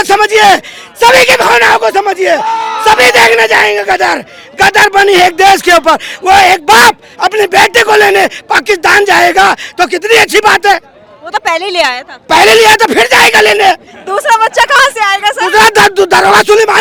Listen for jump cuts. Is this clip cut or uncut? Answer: uncut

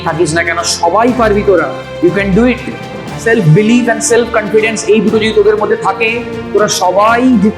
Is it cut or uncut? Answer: uncut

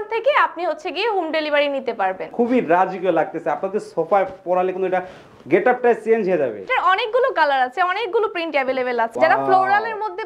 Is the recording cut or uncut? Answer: cut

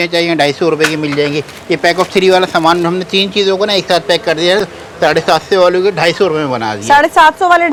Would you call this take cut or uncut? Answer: uncut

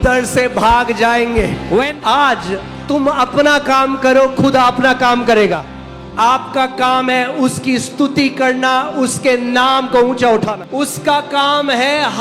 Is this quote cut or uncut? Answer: cut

